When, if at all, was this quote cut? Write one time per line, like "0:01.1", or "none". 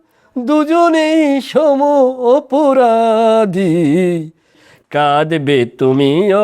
0:04.6

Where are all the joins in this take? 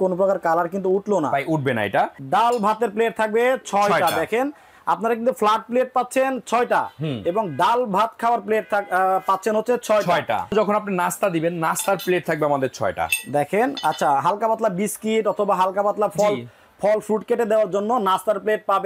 0:02.1
0:10.5

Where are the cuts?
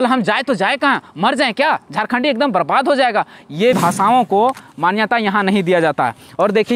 0:03.8

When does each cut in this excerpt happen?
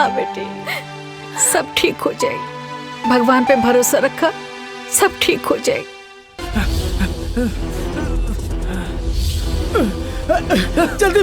0:06.4

